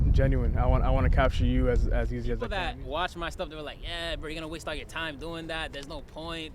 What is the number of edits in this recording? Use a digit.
1